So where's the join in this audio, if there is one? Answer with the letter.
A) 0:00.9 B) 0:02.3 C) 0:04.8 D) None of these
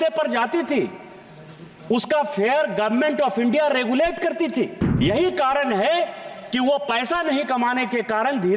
C